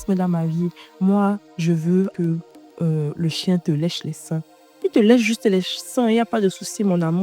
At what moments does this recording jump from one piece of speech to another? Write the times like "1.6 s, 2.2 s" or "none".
2.1 s